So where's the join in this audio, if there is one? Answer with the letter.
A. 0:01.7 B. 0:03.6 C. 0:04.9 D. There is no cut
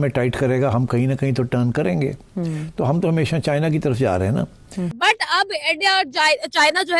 C